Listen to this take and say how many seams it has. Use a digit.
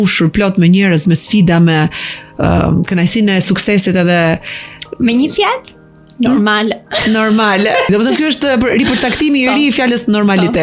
0